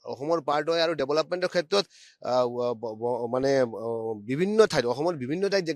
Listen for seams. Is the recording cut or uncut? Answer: uncut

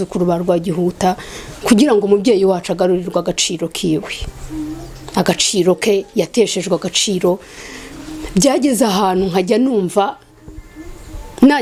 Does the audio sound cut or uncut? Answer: uncut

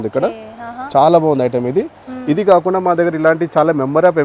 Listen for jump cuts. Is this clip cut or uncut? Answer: uncut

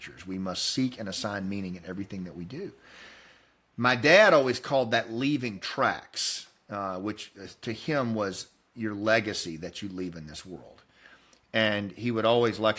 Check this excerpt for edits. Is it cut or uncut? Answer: uncut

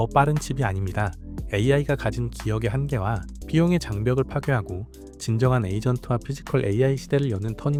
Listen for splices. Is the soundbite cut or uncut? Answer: uncut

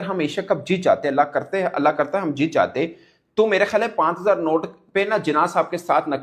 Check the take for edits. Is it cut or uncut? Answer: uncut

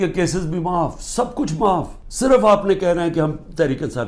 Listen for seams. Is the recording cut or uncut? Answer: uncut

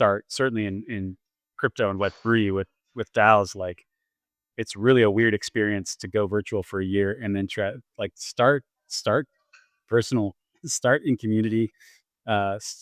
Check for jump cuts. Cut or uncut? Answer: uncut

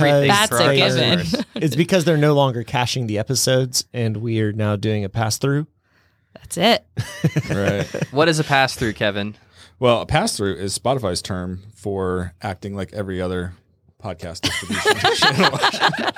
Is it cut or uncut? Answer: uncut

